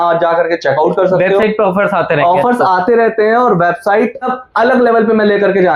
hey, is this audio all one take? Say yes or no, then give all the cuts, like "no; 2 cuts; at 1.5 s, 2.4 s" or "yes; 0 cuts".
yes; 0 cuts